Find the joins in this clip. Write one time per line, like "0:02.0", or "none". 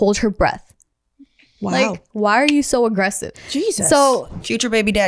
0:02.1
0:03.3